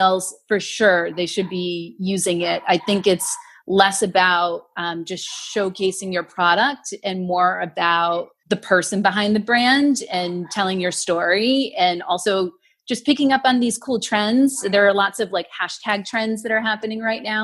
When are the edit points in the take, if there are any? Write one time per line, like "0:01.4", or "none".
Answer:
0:08.3